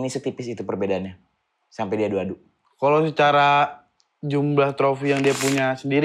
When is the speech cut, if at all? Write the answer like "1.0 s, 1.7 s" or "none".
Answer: none